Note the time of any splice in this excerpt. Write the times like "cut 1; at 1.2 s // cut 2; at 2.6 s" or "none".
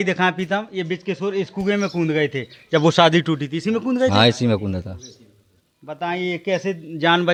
none